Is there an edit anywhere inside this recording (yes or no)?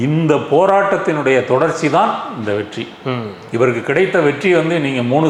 no